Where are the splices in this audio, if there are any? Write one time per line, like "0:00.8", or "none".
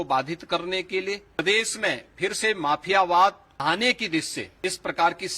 0:01.4
0:03.5
0:04.4